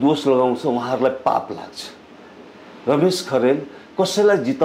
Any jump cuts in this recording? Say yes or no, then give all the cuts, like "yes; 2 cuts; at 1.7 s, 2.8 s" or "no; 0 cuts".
no; 0 cuts